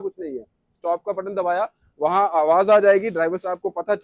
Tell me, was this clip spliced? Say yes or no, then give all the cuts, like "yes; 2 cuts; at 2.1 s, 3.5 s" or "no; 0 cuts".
no; 0 cuts